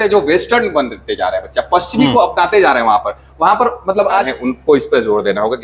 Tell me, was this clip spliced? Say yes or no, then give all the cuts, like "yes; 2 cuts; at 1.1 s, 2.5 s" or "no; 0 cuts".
yes; 1 cut; at 4.3 s